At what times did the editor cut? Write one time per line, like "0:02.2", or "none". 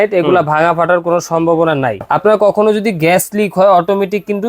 0:02.0